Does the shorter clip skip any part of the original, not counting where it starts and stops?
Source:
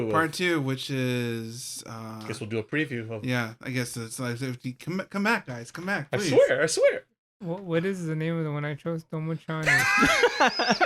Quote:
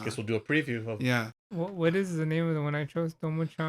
yes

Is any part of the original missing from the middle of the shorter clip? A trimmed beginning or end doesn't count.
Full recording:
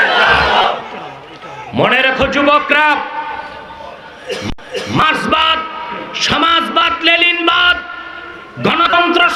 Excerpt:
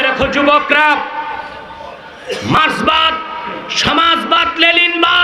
yes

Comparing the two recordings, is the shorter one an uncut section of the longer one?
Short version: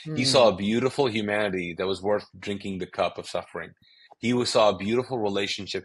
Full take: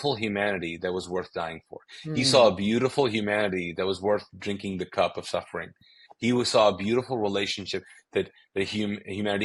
yes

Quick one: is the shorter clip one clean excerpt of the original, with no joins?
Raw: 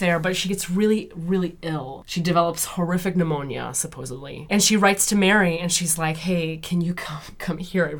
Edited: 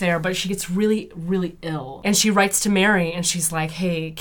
no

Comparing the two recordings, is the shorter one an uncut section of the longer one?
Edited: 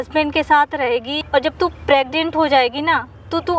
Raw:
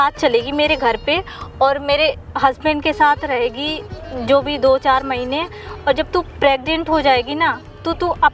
no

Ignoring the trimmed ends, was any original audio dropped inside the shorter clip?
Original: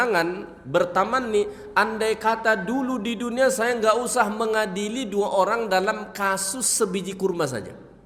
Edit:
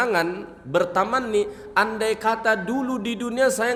no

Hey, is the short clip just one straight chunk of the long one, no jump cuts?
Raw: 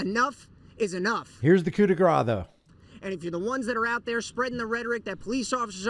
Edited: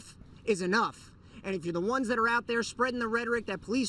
no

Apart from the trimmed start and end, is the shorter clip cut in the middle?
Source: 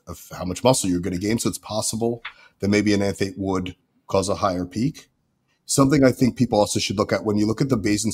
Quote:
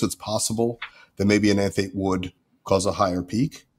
no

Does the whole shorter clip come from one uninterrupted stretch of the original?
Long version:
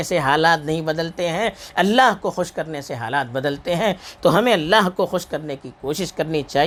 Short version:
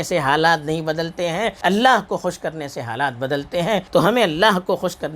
no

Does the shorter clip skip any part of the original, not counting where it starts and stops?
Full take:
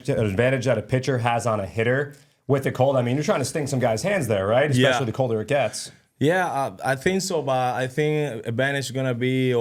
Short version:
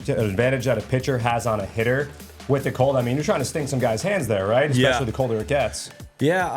no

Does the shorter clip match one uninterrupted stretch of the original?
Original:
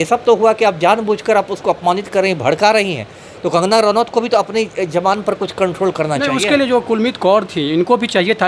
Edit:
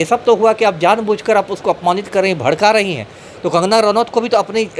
yes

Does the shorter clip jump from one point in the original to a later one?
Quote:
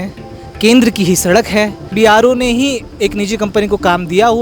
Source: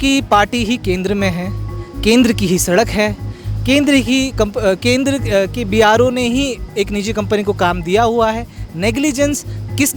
yes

